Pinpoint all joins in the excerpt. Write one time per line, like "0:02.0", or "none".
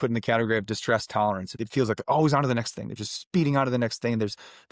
0:01.6